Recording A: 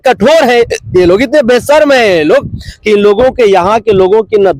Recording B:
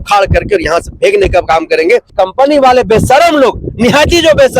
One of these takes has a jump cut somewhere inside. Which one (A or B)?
B